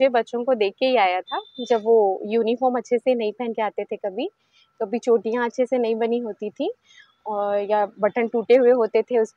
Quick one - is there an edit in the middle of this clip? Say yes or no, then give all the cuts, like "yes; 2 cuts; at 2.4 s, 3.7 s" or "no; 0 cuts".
no; 0 cuts